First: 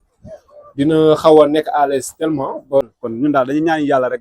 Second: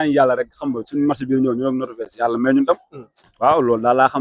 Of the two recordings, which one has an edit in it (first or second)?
first